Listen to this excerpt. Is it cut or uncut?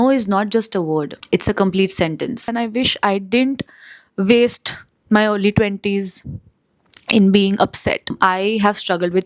cut